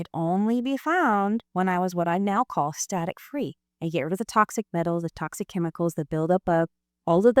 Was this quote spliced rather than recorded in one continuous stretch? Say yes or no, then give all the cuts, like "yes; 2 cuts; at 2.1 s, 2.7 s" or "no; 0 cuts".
yes; 1 cut; at 1.5 s